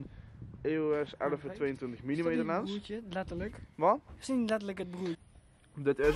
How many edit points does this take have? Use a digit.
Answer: 1